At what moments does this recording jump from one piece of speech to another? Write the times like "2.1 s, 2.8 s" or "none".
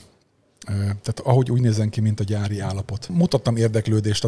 3.0 s